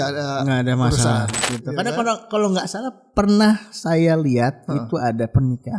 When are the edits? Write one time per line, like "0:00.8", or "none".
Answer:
0:01.4